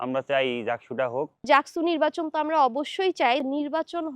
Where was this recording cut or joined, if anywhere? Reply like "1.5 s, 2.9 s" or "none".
1.4 s, 3.4 s